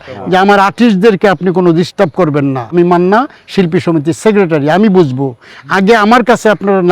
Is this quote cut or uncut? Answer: cut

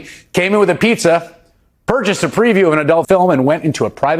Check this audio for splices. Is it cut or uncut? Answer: cut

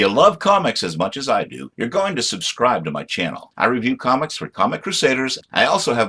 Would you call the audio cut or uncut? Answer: uncut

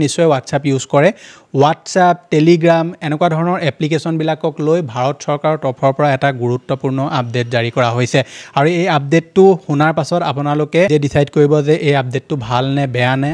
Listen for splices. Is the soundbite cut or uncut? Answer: uncut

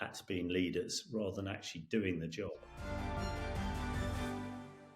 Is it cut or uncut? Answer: cut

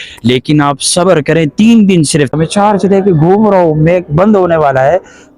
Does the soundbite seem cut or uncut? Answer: cut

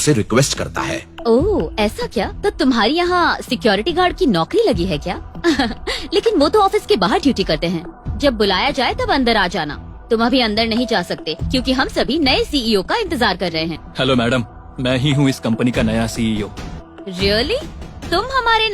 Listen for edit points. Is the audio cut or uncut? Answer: cut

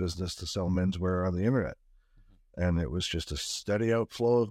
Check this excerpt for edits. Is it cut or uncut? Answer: uncut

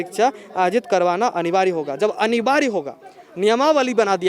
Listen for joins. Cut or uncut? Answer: uncut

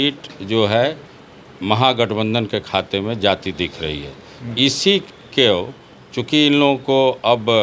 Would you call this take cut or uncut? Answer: uncut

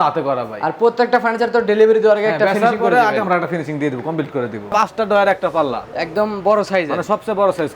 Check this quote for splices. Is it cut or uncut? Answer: cut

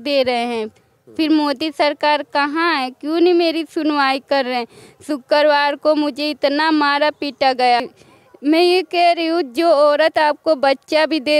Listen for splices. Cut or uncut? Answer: cut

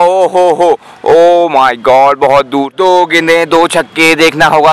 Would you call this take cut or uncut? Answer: cut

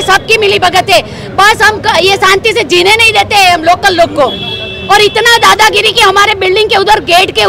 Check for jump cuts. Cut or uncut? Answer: uncut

